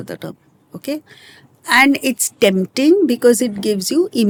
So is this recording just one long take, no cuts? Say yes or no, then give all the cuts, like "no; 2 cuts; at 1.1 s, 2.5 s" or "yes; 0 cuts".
yes; 0 cuts